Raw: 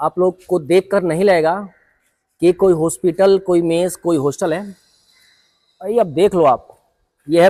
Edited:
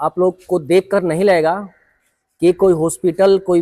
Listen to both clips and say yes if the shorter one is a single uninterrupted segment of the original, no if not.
yes